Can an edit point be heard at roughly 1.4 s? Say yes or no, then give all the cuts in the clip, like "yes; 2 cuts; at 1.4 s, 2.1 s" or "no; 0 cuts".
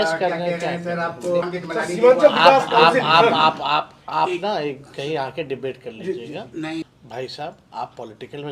yes; 2 cuts; at 1.4 s, 6.8 s